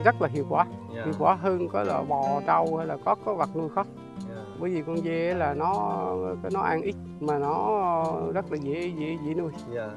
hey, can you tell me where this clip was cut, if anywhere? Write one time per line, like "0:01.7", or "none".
none